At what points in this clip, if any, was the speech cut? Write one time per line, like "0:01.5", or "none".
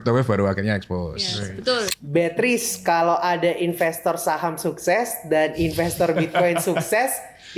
0:02.0